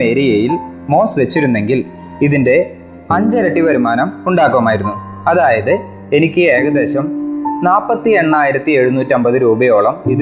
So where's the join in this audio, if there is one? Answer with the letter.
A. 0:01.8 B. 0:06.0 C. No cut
C